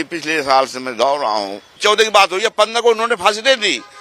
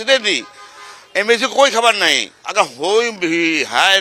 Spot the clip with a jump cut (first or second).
first